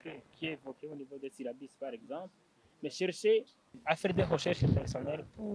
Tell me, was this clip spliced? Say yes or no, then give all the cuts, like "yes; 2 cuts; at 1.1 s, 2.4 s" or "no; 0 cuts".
yes; 1 cut; at 3.7 s